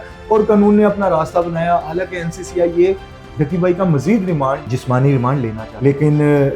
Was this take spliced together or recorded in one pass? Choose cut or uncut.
cut